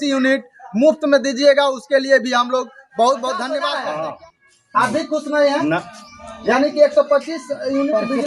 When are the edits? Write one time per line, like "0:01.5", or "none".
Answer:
0:03.6